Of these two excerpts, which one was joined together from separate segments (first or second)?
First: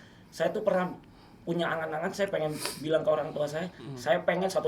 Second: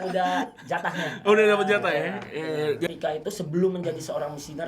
second